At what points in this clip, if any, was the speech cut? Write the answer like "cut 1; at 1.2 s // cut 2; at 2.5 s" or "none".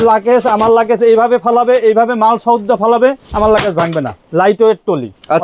cut 1; at 4.2 s